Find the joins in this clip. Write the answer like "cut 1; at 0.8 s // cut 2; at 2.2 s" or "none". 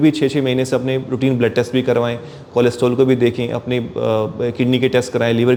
none